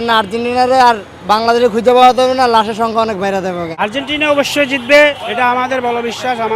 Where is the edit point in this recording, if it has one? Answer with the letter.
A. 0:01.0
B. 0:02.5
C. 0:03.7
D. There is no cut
C